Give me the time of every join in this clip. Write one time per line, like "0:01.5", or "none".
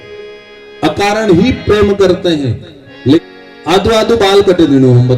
0:03.2